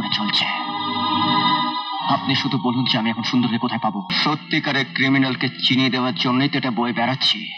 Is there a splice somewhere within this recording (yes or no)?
yes